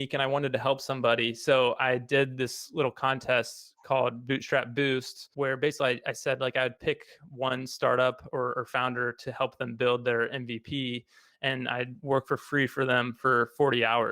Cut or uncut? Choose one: cut